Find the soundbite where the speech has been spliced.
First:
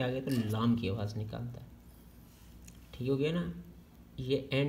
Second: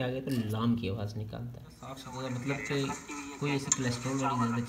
second; 1 cut; at 2.0 s

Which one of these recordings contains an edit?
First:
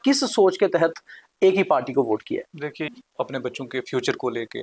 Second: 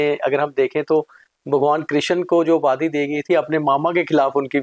first; 1 cut; at 2.9 s

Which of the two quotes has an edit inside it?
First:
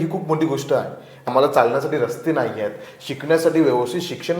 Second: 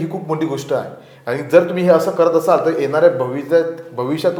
first; 1 cut; at 1.3 s

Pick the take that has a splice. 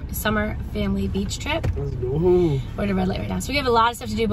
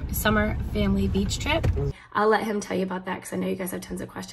second; 1 cut; at 1.9 s

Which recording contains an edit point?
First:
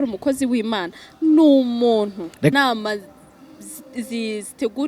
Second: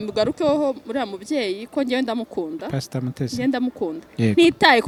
first; 1 cut; at 2.5 s

